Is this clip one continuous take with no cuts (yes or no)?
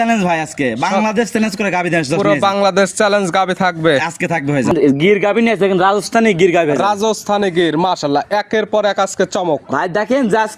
no